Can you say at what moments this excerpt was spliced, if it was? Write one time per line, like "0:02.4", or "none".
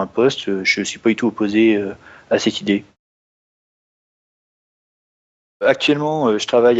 none